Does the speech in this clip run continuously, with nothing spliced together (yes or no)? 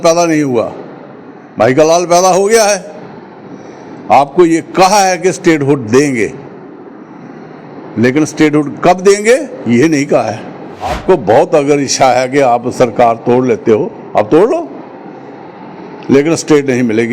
no